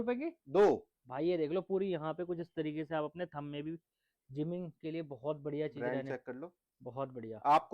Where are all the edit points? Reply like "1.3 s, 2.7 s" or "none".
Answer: none